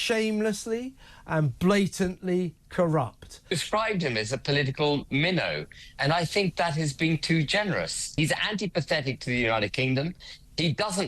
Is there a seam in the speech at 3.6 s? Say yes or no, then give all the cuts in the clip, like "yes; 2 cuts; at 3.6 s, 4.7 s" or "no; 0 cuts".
yes; 2 cuts; at 3.6 s, 8.0 s